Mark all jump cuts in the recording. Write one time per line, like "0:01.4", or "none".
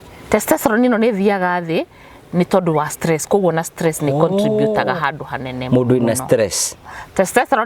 none